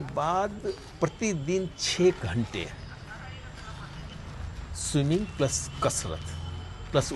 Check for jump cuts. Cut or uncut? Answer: uncut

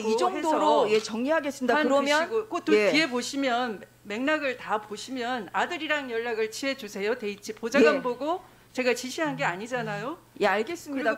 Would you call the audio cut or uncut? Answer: uncut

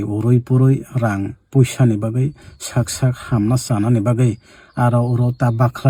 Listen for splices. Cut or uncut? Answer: uncut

